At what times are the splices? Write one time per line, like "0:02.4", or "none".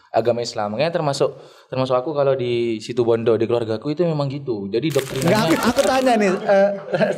0:05.2